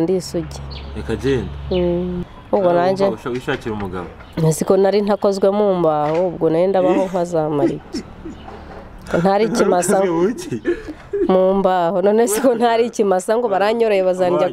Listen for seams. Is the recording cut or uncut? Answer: cut